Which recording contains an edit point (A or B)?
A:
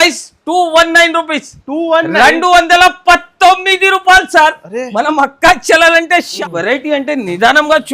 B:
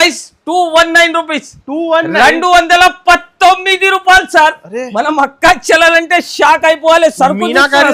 A